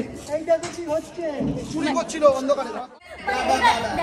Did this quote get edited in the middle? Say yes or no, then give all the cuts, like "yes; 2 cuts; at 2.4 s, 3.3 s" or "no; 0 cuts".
yes; 1 cut; at 2.8 s